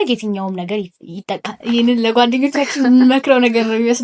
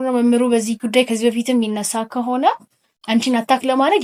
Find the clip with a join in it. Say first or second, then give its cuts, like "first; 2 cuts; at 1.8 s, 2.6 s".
first; 1 cut; at 1.5 s